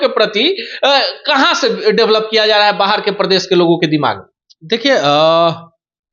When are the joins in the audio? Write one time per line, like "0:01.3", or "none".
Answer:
none